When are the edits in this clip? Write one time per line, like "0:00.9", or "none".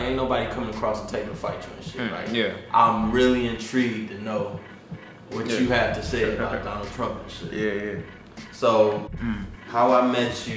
0:09.1